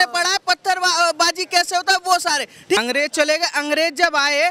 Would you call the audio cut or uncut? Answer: cut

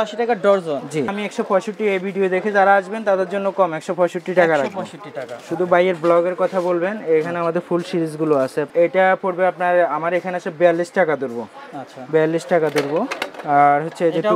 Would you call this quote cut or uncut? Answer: cut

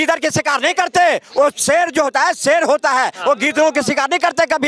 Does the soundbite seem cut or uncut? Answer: uncut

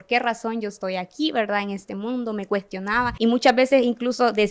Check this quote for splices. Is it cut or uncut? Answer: cut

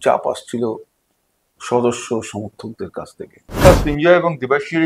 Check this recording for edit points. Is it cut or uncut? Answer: cut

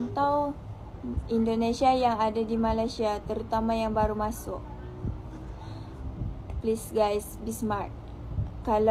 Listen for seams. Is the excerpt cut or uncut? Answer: uncut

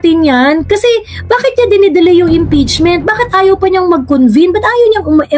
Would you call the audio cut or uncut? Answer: uncut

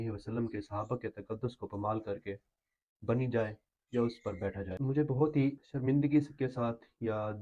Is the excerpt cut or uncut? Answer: cut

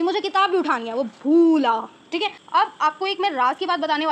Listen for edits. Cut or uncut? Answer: cut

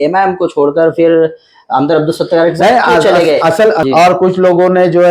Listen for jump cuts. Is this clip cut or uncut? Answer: cut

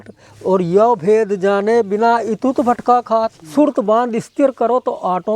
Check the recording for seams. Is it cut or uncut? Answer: cut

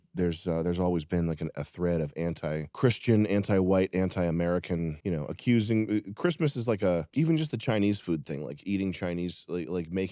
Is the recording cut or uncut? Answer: uncut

